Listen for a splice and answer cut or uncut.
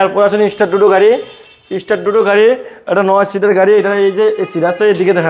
uncut